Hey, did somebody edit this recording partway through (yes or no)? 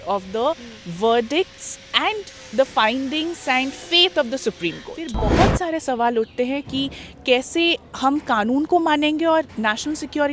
yes